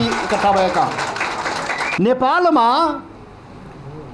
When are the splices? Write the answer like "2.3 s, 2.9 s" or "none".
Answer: 1.9 s